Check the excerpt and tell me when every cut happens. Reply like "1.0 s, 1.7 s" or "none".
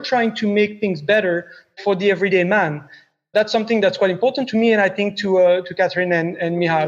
1.8 s, 3.3 s, 4.4 s, 5.7 s